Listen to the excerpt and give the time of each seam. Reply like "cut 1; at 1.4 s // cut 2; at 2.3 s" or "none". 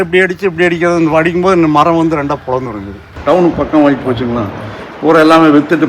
cut 1; at 3.1 s